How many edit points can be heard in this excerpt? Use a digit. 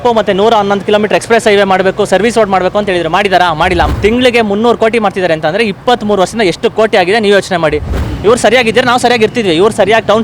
2